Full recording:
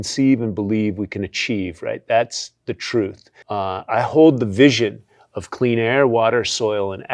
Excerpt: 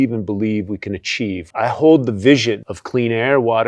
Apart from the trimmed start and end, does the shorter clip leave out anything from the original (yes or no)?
yes